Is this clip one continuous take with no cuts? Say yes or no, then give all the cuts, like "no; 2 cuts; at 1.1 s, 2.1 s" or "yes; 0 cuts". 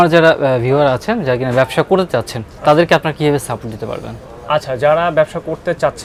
yes; 0 cuts